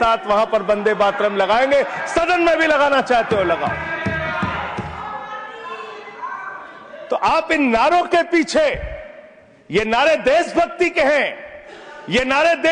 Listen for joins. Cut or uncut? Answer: uncut